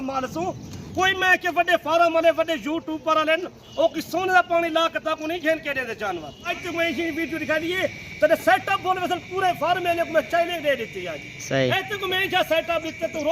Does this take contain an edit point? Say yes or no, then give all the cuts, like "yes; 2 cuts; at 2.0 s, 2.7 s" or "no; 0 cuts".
yes; 1 cut; at 6.5 s